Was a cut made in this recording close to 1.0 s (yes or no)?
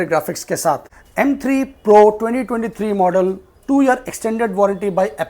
yes